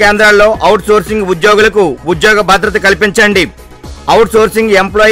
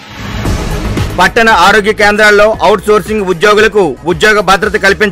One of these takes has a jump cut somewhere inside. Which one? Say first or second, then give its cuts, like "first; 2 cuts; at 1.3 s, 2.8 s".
second; 1 cut; at 1.1 s